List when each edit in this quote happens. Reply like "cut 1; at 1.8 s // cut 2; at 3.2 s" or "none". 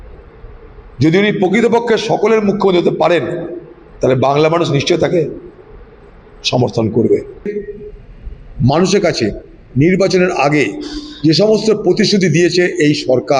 cut 1; at 7.5 s